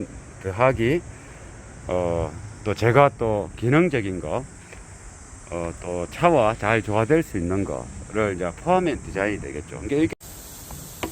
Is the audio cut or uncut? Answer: cut